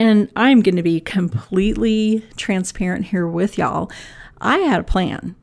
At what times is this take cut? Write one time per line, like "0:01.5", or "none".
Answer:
none